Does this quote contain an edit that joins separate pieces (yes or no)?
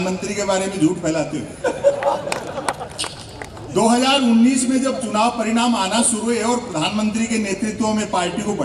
no